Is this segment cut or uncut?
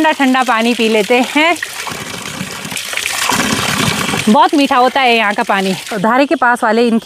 uncut